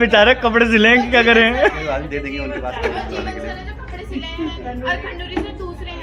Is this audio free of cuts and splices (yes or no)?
yes